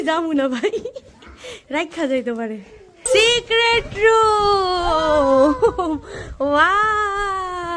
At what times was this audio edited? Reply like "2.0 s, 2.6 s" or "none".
3.0 s